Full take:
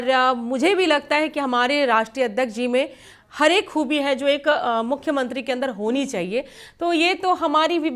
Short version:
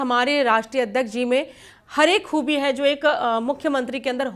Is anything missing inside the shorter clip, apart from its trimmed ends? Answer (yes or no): no